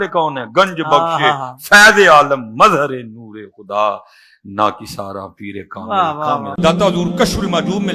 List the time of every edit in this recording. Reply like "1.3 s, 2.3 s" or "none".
6.5 s